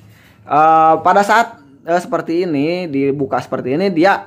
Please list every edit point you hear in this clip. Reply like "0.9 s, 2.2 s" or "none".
none